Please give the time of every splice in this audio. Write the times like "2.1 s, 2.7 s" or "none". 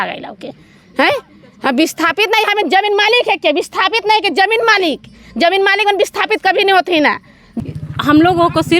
7.4 s